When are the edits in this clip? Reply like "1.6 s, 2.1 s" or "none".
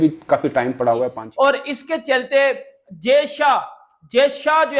1.2 s